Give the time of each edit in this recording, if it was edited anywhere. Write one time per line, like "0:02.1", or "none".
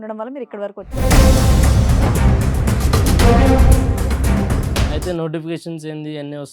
0:01.0
0:04.9